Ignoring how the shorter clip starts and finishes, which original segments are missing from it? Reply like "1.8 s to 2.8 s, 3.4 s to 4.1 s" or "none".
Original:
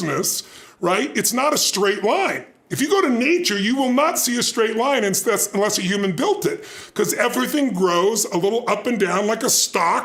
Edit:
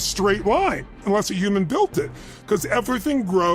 2.5 s to 5.4 s